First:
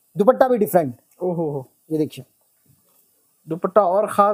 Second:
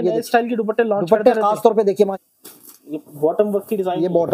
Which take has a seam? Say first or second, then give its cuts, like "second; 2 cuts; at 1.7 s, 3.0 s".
second; 1 cut; at 2.0 s